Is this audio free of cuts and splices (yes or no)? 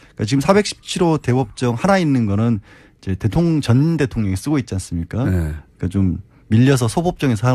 no